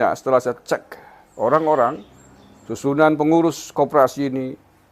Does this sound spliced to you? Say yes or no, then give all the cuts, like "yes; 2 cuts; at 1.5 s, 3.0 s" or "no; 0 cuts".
no; 0 cuts